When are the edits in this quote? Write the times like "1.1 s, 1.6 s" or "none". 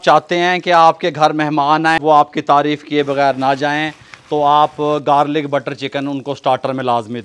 2.0 s